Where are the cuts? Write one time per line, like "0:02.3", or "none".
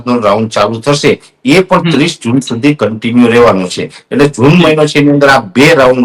none

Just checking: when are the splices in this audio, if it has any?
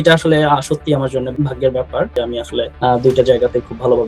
0:01.3
0:02.4

